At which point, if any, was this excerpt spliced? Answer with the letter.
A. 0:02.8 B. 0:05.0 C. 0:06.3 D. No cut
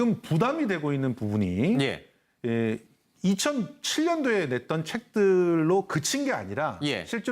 B